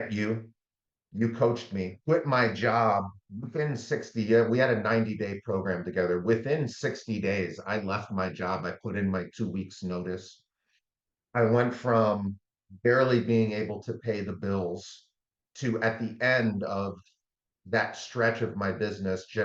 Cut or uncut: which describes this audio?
cut